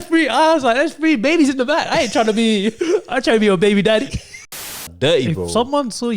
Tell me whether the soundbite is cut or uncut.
cut